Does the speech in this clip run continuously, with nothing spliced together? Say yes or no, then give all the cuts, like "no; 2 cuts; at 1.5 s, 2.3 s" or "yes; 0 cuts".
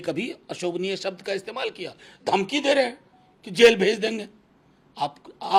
yes; 0 cuts